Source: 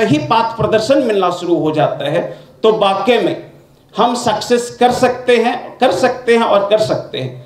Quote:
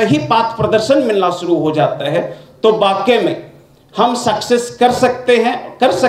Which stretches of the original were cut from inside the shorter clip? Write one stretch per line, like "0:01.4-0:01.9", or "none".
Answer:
none